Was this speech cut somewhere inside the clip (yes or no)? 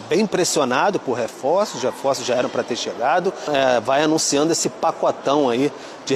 yes